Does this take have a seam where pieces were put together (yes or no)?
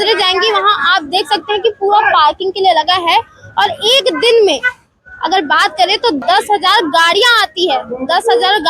yes